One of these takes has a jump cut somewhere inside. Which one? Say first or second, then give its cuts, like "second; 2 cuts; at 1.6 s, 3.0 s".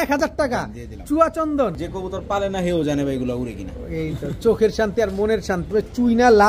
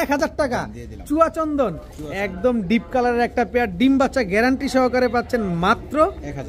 first; 2 cuts; at 1.8 s, 5.7 s